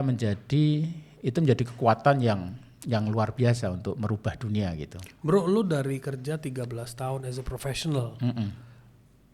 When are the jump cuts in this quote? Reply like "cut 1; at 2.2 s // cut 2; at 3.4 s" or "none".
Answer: none